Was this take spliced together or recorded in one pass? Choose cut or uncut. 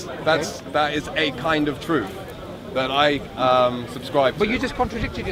uncut